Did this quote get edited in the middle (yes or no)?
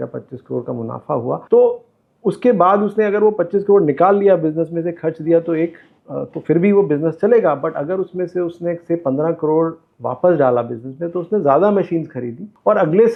no